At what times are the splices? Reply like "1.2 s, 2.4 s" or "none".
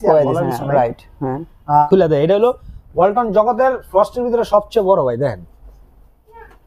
1.8 s